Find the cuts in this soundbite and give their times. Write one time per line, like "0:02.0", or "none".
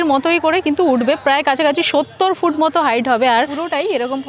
0:03.4